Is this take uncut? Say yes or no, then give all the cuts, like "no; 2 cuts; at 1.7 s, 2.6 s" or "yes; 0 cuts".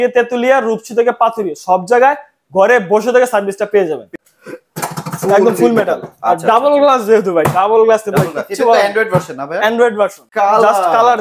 no; 2 cuts; at 4.1 s, 10.2 s